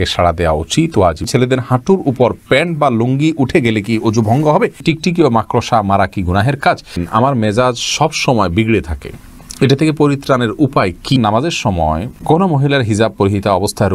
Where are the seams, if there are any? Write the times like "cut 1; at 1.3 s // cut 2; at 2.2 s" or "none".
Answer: cut 1; at 1.3 s // cut 2; at 4.8 s // cut 3; at 7.0 s // cut 4; at 11.2 s